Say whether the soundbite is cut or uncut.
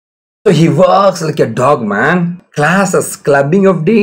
cut